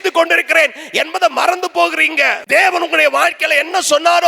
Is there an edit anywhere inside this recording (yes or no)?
yes